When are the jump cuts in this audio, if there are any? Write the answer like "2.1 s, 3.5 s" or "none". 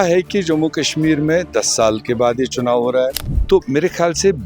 3.3 s